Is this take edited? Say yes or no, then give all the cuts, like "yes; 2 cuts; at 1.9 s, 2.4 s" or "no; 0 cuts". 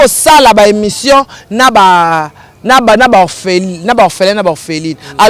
no; 0 cuts